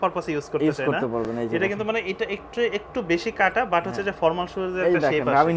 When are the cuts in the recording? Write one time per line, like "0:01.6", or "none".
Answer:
none

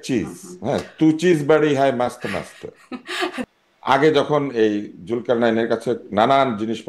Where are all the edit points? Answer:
0:03.5

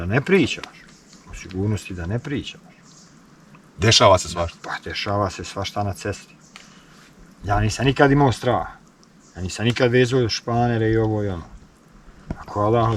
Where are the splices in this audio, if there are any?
none

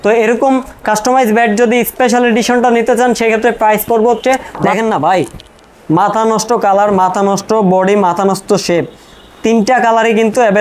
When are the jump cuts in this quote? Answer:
0:04.5

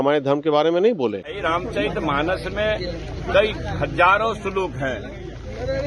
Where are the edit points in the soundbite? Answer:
0:01.4

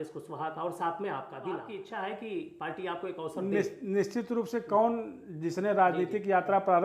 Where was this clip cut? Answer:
0:01.7

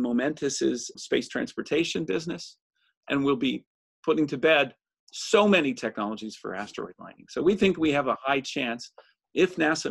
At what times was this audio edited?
0:00.9

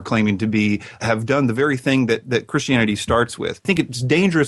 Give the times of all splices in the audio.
0:01.0
0:03.6

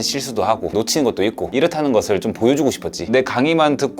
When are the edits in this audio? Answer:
0:00.7
0:03.0

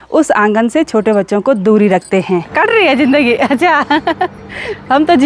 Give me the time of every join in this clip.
0:02.5

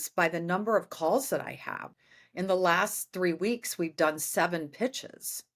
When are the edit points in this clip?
0:01.9

